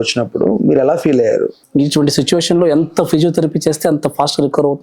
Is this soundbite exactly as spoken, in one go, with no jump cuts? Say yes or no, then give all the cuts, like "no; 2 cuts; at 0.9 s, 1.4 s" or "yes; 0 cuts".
no; 1 cut; at 1.6 s